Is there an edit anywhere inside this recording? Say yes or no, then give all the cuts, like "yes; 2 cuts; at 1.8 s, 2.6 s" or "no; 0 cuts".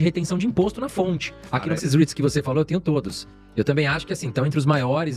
yes; 1 cut; at 1.8 s